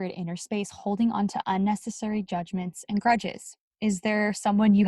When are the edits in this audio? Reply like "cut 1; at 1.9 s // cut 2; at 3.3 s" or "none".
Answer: none